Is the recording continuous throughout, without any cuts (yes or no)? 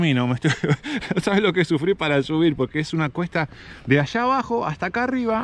yes